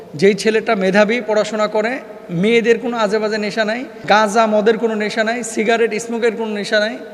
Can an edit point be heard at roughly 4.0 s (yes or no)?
yes